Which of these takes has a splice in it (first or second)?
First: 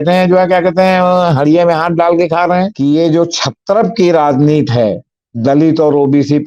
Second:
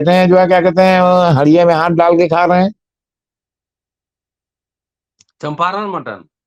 first